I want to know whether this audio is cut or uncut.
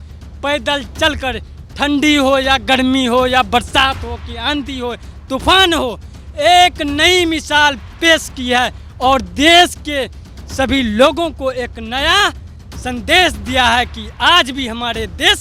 uncut